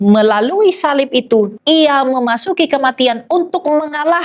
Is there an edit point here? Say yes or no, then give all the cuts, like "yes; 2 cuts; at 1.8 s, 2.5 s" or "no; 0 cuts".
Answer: yes; 1 cut; at 1.6 s